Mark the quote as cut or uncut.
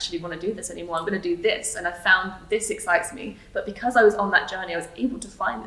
uncut